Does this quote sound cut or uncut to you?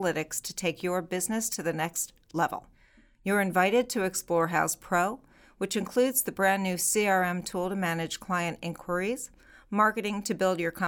uncut